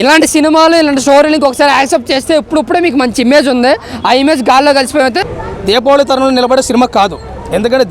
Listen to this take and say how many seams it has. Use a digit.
1